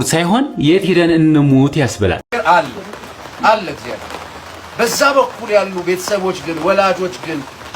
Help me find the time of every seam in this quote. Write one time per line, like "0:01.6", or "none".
0:02.2